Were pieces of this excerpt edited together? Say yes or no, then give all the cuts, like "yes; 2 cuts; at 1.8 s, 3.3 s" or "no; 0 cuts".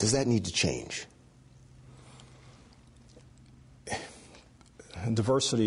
no; 0 cuts